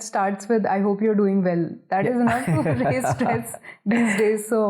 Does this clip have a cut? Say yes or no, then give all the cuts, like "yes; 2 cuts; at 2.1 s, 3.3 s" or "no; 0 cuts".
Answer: no; 0 cuts